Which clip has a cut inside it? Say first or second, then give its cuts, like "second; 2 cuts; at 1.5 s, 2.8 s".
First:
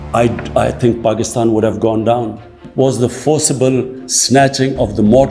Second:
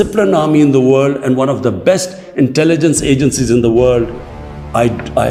first; 1 cut; at 2.6 s